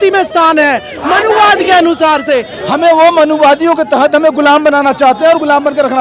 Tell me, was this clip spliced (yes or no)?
yes